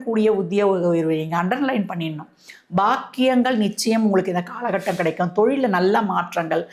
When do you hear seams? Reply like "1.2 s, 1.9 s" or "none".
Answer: none